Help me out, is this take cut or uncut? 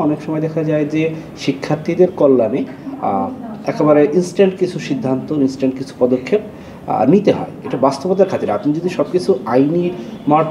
uncut